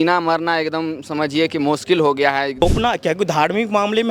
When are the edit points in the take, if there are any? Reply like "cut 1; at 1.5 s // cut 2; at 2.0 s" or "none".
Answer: cut 1; at 2.6 s